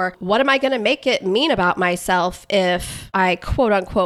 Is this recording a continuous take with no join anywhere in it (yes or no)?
no